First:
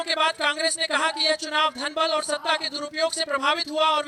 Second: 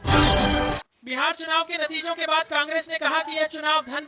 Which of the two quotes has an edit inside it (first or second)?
second